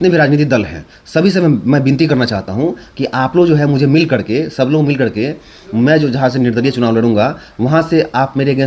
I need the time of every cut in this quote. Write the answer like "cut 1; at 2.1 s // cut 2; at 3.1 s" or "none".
none